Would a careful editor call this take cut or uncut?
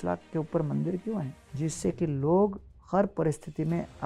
cut